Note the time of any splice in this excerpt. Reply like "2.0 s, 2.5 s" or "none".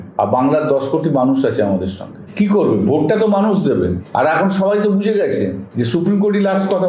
none